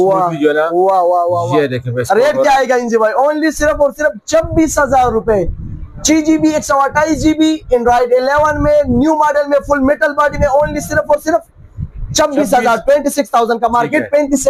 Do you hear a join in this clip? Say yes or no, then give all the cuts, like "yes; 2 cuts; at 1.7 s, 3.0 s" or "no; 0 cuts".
no; 0 cuts